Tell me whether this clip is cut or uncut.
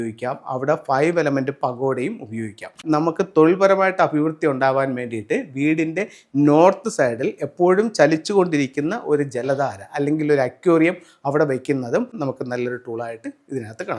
cut